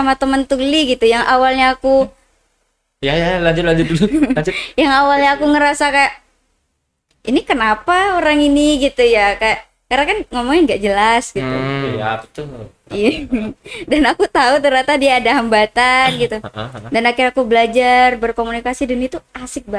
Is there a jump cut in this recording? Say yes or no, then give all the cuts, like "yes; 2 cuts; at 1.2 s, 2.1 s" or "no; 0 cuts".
no; 0 cuts